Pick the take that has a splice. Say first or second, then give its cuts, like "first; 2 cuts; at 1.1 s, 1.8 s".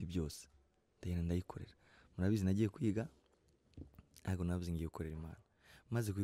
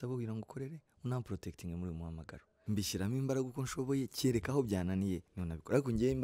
second; 1 cut; at 2.5 s